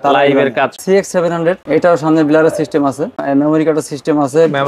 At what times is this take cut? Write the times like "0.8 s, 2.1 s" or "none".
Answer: 0.8 s, 1.6 s, 3.2 s